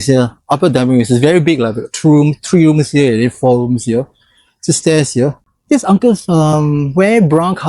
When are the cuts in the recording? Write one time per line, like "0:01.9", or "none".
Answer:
0:05.5